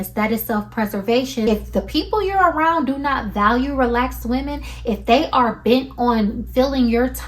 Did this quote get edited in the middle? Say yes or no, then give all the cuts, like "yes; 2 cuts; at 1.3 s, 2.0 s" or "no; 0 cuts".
yes; 1 cut; at 1.5 s